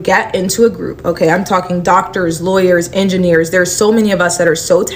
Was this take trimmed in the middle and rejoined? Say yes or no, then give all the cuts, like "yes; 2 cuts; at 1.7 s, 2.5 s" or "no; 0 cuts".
no; 0 cuts